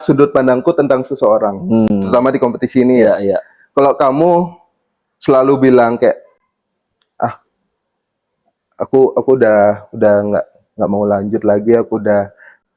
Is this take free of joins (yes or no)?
yes